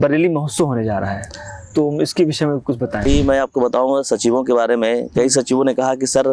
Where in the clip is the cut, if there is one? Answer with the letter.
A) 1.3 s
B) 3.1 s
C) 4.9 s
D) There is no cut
B